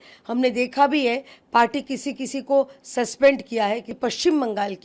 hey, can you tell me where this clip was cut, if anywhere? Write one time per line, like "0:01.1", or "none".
0:03.9